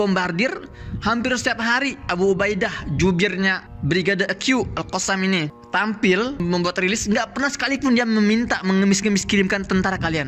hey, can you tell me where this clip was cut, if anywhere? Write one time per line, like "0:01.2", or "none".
0:03.7
0:05.6
0:06.4